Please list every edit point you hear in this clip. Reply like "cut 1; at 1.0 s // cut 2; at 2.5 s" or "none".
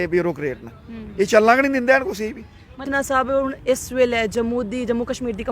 cut 1; at 2.9 s

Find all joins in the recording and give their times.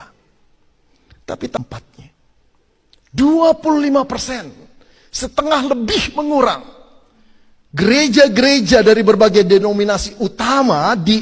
cut 1; at 1.6 s

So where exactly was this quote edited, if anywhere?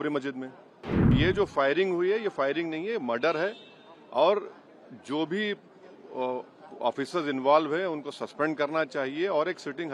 cut 1; at 0.9 s

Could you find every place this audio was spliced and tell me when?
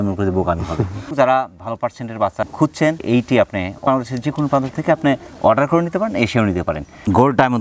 none

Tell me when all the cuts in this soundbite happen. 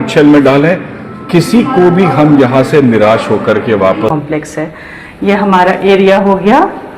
cut 1; at 4.1 s

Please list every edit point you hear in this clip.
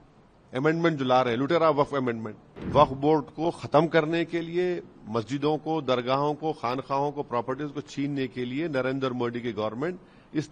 cut 1; at 2.6 s

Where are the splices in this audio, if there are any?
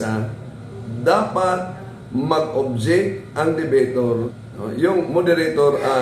cut 1; at 4.2 s

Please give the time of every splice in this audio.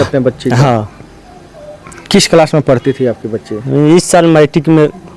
none

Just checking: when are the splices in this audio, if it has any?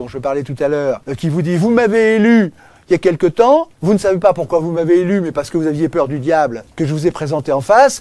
cut 1; at 1.1 s // cut 2; at 6.6 s

